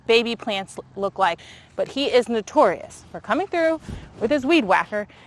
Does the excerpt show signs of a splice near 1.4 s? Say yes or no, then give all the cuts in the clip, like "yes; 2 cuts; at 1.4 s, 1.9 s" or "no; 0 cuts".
yes; 1 cut; at 1.4 s